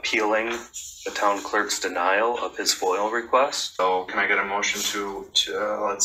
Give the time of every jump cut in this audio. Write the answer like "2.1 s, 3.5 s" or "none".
3.8 s